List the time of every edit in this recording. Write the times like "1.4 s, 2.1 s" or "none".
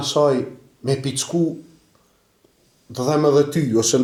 none